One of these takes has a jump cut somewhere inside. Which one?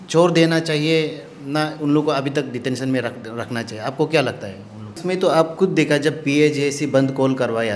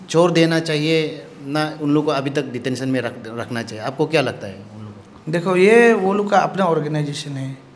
first; 1 cut; at 4.9 s

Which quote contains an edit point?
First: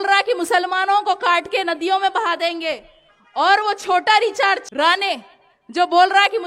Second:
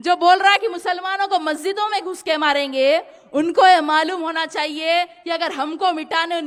first; 1 cut; at 4.7 s

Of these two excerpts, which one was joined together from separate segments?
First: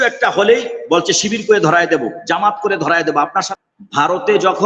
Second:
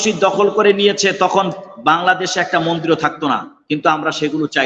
first; 1 cut; at 3.5 s

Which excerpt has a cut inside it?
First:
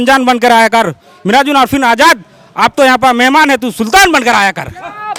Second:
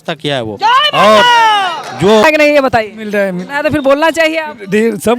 second; 1 cut; at 2.2 s

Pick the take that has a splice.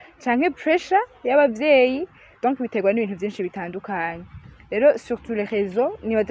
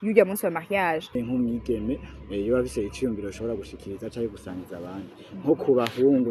second; 1 cut; at 1.2 s

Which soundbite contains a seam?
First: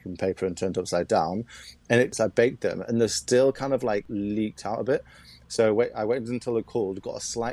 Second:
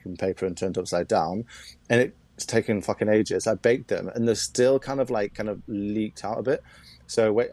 first; 2 cuts; at 2.2 s, 4.1 s

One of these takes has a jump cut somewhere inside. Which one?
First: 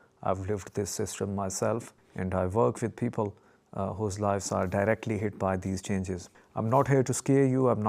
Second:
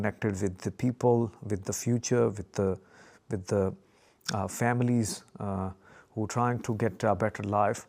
first; 2 cuts; at 2.0 s, 6.4 s

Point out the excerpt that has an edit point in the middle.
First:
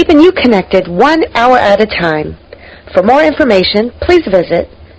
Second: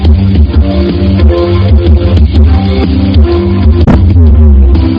second; 1 cut; at 3.9 s

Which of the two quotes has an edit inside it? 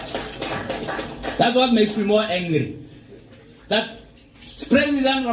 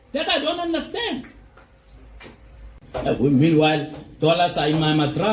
second; 1 cut; at 3.0 s

